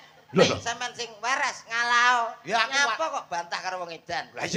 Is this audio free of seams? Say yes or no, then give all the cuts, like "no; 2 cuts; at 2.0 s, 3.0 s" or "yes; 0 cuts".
yes; 0 cuts